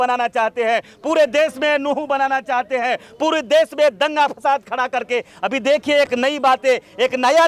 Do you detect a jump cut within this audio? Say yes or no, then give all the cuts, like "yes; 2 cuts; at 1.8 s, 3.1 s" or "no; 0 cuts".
no; 0 cuts